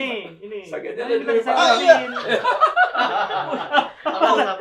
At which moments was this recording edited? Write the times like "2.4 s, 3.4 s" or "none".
none